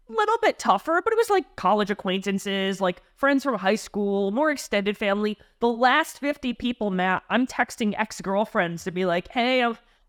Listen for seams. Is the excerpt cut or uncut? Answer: uncut